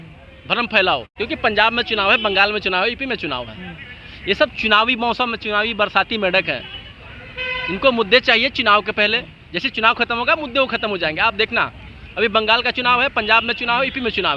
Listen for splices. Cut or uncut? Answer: cut